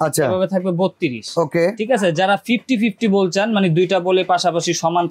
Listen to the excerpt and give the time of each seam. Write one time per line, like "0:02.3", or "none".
none